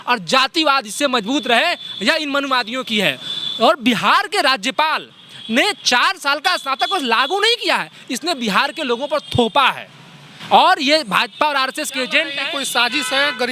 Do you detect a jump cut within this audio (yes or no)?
no